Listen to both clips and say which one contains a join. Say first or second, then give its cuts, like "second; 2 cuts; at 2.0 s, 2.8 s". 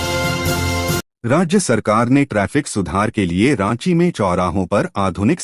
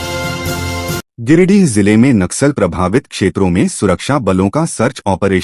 second; 1 cut; at 1.1 s